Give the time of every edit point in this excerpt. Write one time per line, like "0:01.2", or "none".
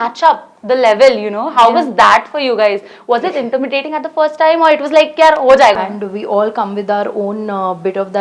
0:05.7